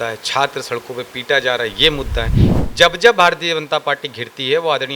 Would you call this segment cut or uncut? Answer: cut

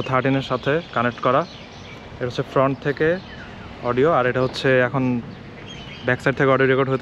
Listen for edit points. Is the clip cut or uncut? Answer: uncut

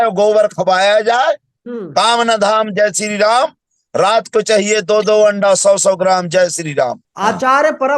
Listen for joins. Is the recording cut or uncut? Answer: cut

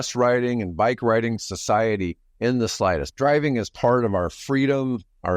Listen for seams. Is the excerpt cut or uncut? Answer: uncut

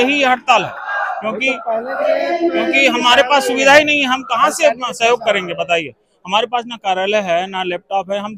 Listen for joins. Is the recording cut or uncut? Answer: uncut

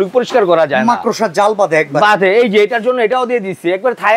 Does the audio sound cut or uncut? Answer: uncut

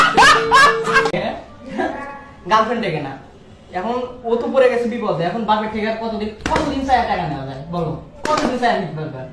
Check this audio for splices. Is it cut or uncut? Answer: uncut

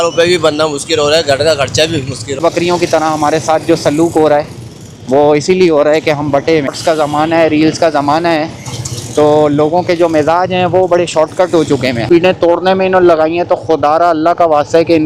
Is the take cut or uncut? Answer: cut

